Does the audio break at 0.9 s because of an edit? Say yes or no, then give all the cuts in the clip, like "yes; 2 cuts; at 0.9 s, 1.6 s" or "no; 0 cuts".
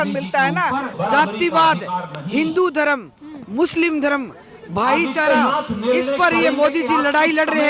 yes; 1 cut; at 0.9 s